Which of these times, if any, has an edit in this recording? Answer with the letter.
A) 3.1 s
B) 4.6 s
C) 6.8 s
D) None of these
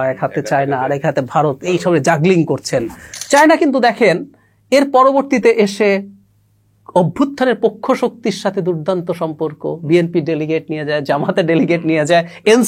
A